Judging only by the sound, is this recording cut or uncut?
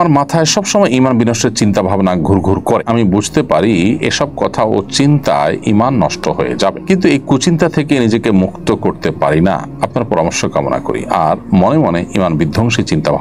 uncut